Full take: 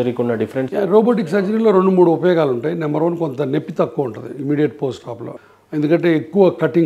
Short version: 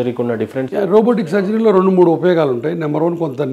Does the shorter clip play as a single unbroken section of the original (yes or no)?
yes